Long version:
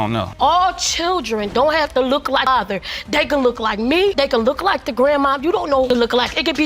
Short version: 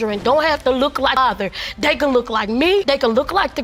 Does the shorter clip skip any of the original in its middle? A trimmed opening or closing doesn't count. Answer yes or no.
no